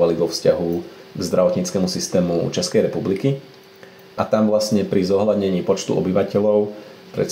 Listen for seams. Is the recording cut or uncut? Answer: uncut